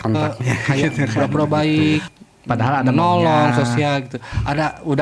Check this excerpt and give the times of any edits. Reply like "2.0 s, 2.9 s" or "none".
1.1 s